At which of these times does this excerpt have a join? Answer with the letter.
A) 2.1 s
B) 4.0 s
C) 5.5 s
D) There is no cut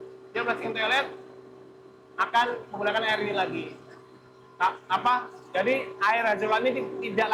D